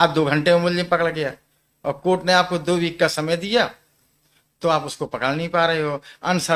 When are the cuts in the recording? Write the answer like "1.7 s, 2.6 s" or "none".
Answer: none